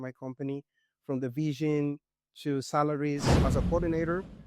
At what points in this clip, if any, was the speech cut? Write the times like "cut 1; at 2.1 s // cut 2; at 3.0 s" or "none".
cut 1; at 3.3 s